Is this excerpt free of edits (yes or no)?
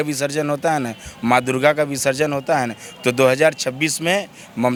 yes